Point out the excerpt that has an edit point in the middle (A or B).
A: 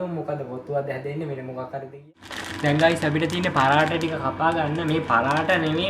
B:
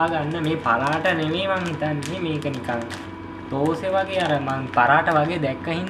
A